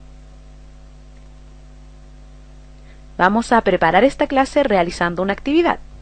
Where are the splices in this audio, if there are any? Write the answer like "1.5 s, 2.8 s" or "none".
1.6 s